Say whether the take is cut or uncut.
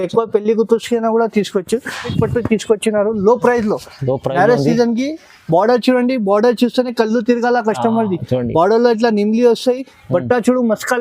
cut